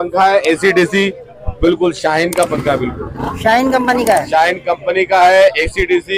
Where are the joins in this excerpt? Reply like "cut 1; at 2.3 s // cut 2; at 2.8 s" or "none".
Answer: none